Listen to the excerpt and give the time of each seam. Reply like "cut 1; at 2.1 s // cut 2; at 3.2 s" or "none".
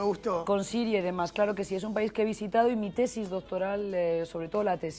cut 1; at 4.1 s